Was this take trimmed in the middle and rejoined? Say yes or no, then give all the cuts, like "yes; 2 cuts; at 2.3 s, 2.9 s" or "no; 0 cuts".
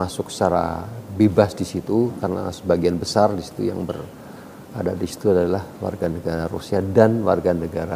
no; 0 cuts